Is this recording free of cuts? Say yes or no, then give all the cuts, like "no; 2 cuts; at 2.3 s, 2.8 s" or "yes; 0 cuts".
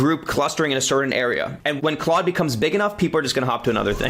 yes; 0 cuts